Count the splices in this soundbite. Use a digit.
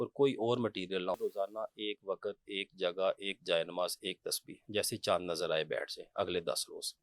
1